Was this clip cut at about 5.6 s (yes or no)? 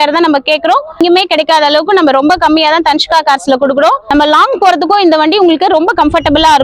no